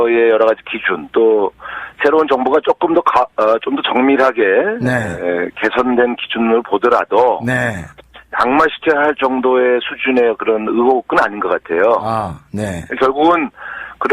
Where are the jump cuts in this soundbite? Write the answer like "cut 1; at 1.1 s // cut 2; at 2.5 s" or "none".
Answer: cut 1; at 2.1 s

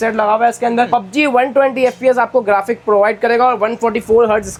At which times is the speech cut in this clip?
none

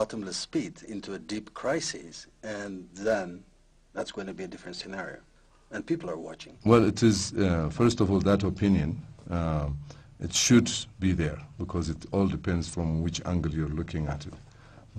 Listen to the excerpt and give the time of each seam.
cut 1; at 2.9 s

